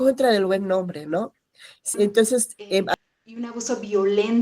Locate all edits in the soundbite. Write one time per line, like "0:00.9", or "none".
0:02.9